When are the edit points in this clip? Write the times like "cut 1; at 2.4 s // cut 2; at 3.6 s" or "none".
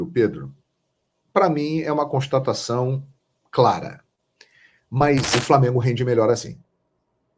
cut 1; at 5.3 s